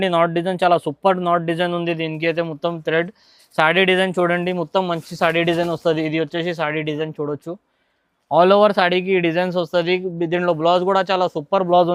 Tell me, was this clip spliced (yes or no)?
no